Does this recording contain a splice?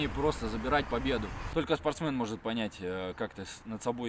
yes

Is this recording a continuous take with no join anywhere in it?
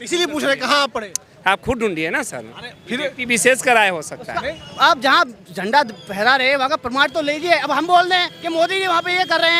yes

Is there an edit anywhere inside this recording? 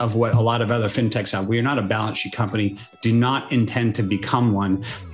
no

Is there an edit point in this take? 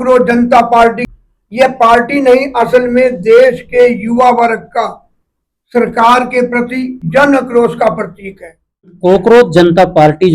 yes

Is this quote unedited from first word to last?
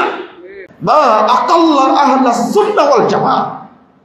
no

